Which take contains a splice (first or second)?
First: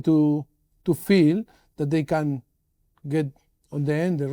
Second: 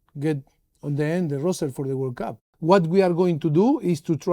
second